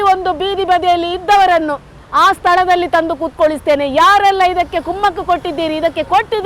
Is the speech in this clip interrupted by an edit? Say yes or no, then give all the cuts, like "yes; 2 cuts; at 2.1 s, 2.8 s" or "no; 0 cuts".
no; 0 cuts